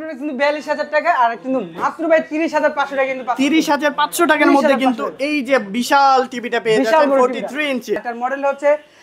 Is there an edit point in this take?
yes; 1 cut; at 8.0 s

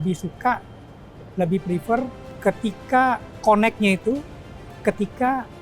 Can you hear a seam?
yes; 1 cut; at 2.2 s

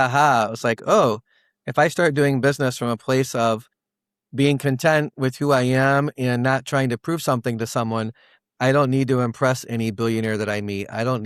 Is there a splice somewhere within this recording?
no; 0 cuts

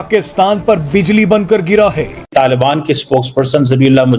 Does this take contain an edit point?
yes; 1 cut; at 2.1 s

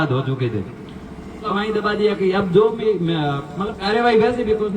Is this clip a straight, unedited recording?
no; 1 cut; at 1.4 s

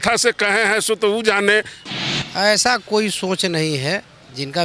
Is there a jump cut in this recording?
yes; 1 cut; at 1.8 s

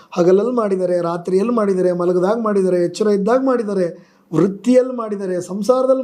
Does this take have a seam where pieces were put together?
no; 0 cuts

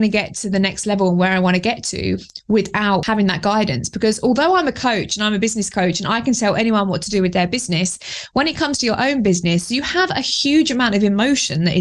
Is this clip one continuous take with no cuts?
no; 1 cut; at 3.0 s

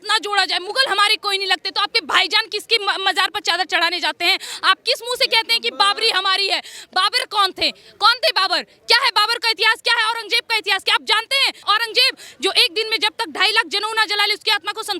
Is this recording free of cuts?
no; 1 cut; at 11.6 s

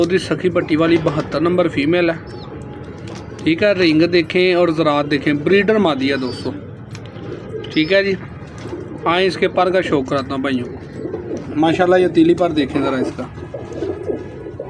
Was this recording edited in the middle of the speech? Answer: no; 0 cuts

